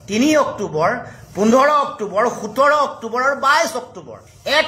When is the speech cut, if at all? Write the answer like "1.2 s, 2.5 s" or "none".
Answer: none